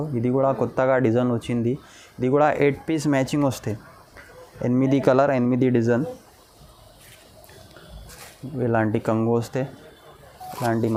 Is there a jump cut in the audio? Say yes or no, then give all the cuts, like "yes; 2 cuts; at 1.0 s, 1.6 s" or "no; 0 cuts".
no; 0 cuts